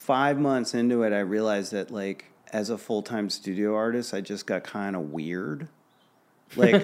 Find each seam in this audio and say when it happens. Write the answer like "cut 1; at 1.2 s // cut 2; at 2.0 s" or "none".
cut 1; at 2.3 s